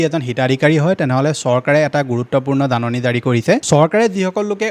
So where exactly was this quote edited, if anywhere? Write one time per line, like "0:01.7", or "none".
0:03.6